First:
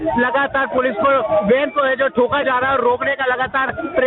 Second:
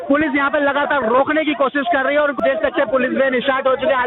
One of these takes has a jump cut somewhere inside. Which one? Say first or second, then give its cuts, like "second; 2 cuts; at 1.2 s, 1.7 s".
second; 1 cut; at 2.3 s